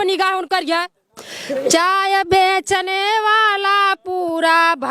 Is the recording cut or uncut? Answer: cut